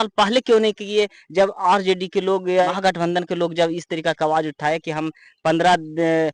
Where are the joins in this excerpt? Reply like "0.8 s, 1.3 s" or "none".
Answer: none